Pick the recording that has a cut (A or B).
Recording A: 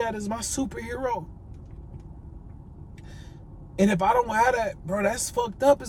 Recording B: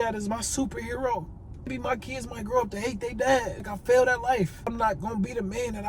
B